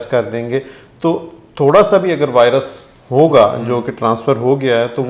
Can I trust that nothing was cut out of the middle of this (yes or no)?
yes